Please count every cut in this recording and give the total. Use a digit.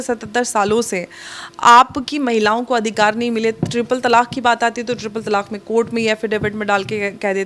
0